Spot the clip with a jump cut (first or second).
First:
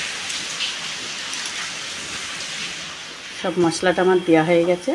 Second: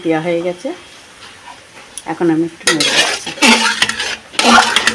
first